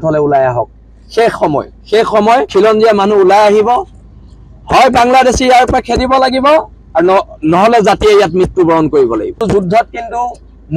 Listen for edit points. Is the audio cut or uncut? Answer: cut